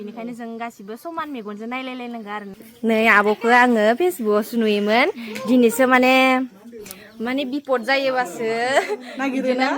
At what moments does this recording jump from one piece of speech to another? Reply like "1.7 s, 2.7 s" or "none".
2.6 s